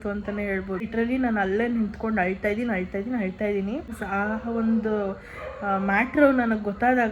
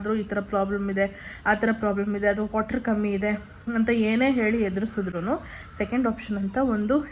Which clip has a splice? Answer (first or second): first